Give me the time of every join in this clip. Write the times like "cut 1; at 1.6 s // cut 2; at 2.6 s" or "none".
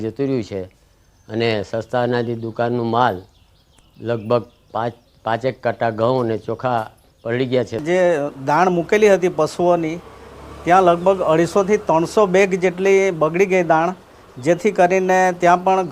cut 1; at 5.1 s